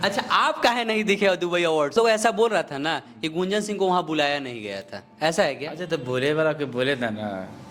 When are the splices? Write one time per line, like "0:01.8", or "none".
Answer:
0:01.9

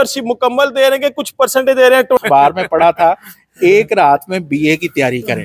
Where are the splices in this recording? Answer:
0:02.2

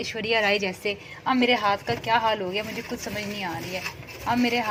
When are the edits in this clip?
none

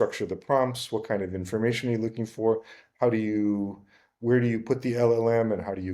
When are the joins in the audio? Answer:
none

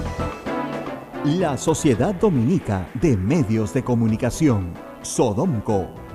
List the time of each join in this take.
0:01.0

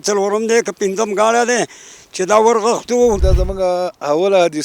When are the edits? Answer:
0:03.2

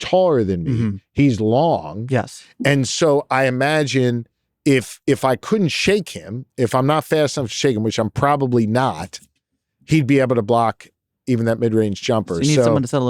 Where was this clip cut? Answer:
none

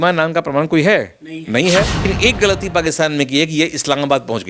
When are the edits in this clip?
0:02.0

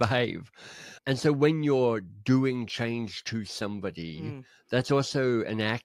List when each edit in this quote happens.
none

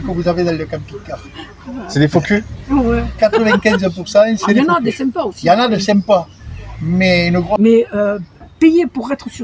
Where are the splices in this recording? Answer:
0:07.6

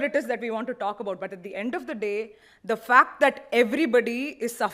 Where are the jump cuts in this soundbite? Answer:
none

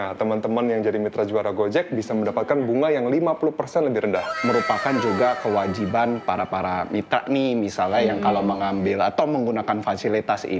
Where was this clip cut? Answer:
0:04.3

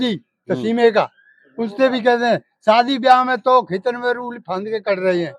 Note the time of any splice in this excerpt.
none

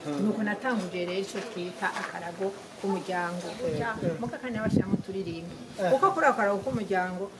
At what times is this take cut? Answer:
0:03.9

